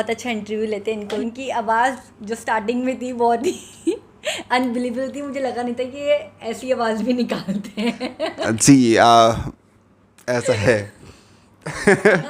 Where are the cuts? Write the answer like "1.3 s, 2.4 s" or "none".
1.1 s